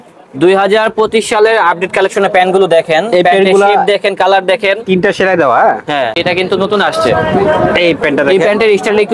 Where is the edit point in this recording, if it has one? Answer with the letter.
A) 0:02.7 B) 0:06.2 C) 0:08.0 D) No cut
B